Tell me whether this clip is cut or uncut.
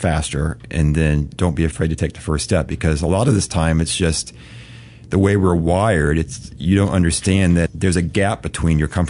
cut